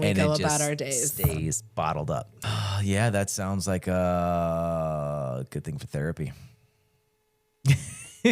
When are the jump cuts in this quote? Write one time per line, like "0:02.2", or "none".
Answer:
0:02.4

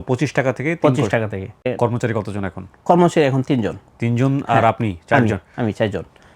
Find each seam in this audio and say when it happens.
0:01.5

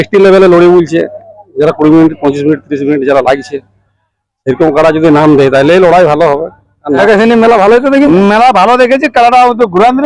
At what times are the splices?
0:07.0

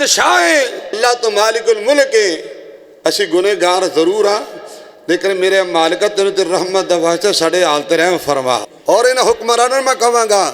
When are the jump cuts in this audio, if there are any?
0:01.0
0:08.7

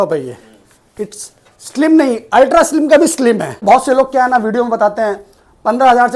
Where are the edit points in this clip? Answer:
0:03.6

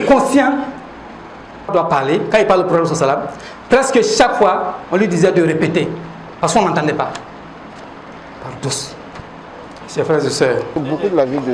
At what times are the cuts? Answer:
0:01.7
0:10.8

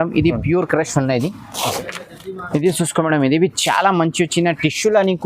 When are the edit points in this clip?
0:01.8

